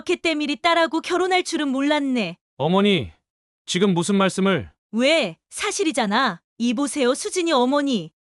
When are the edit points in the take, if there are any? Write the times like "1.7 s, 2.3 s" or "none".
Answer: 4.8 s